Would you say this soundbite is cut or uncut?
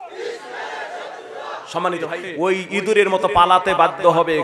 cut